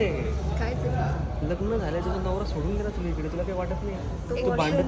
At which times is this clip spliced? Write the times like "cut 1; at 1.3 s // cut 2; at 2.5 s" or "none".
none